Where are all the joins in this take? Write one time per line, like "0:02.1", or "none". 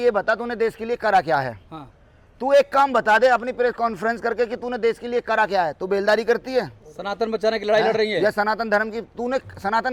none